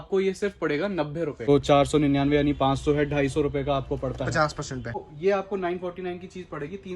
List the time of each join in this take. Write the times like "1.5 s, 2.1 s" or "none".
1.5 s, 5.1 s